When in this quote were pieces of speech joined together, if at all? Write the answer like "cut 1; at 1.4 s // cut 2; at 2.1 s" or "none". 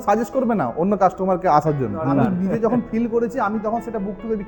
cut 1; at 2.2 s